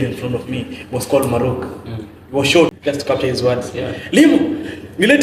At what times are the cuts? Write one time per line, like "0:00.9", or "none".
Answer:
0:02.7